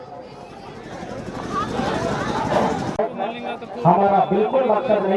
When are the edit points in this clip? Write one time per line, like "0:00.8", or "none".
0:03.0